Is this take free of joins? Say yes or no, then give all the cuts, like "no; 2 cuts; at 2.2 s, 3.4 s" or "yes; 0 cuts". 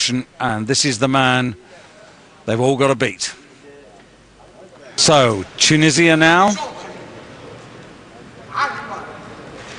yes; 0 cuts